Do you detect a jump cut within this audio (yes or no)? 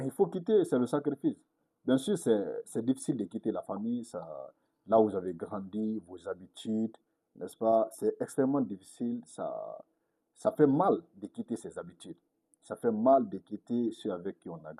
no